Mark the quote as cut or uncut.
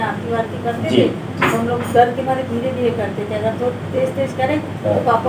uncut